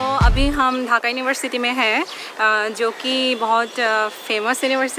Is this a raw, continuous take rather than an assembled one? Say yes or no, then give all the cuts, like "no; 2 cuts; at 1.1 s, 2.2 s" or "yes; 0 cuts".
yes; 0 cuts